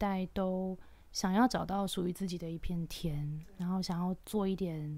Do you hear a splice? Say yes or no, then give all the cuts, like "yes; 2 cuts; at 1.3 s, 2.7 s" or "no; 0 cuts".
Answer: no; 0 cuts